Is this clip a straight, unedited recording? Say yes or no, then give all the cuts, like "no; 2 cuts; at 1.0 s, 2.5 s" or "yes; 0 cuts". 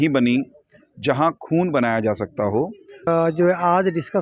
no; 1 cut; at 3.1 s